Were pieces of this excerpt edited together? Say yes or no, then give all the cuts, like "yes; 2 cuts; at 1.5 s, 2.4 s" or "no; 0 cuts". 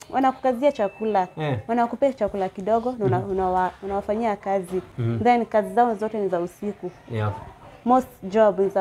no; 0 cuts